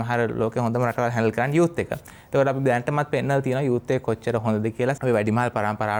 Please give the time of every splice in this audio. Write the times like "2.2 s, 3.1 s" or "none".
none